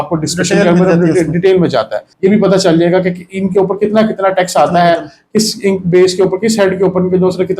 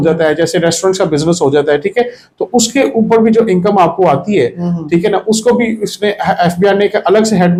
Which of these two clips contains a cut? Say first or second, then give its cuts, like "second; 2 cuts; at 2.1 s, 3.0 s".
first; 1 cut; at 2.0 s